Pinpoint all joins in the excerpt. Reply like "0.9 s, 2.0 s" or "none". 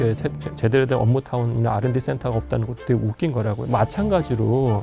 3.6 s